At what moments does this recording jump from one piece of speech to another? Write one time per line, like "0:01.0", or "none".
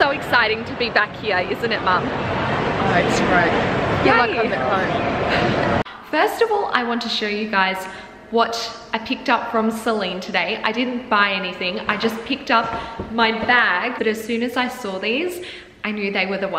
0:05.9
0:14.0

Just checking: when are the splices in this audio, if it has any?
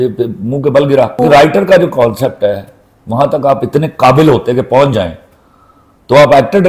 0:01.2

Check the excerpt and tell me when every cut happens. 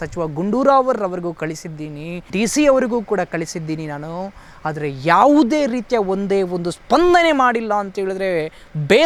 none

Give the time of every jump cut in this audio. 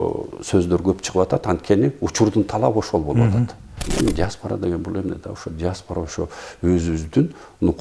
0:03.8

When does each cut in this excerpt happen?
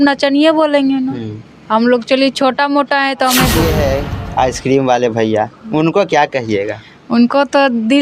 0:03.6

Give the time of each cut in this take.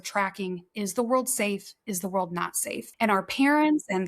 0:02.9

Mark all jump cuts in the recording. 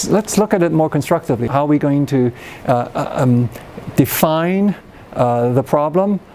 0:01.5

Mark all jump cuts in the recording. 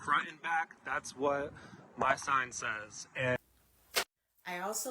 0:03.4

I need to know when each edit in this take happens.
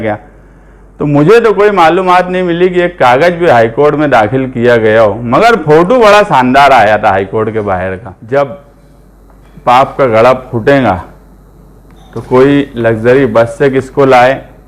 0:08.1

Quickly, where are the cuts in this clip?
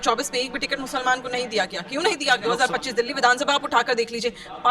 0:02.4

